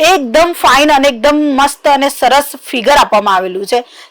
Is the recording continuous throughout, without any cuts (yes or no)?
yes